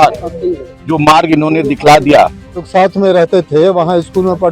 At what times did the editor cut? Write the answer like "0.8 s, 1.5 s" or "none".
2.6 s